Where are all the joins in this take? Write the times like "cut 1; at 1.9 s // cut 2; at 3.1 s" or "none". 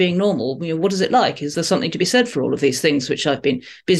cut 1; at 1.5 s